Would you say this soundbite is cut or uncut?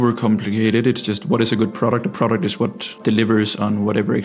cut